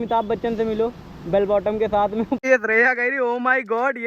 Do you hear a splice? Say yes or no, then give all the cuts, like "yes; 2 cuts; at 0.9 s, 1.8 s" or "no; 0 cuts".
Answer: yes; 1 cut; at 2.4 s